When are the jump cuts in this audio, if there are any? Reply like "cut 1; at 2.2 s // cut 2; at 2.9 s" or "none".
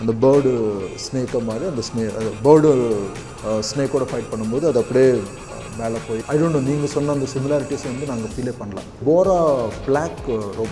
cut 1; at 6.2 s // cut 2; at 9.0 s